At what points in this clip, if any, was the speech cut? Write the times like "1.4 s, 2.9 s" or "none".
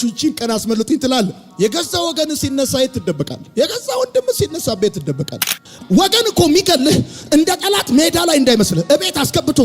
5.7 s